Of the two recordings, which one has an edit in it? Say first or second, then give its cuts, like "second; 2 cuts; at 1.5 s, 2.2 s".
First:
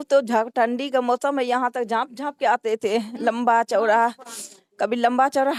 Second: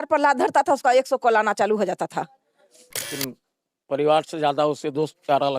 second; 1 cut; at 3.2 s